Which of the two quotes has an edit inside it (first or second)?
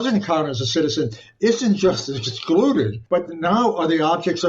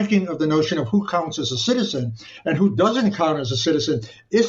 first